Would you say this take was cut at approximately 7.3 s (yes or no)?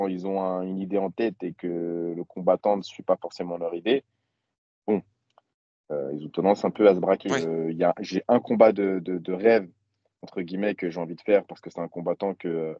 yes